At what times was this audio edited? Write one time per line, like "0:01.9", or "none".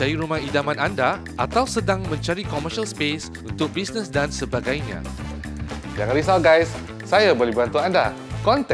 none